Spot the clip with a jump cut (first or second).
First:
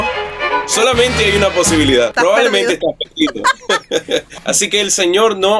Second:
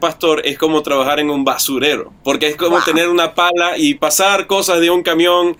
first